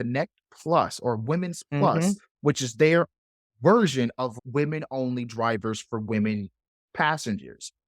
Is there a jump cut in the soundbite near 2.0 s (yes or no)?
no